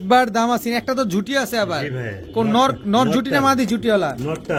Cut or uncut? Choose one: uncut